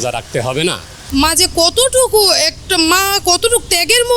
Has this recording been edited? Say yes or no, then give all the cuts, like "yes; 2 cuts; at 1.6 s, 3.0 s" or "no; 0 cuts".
yes; 1 cut; at 0.9 s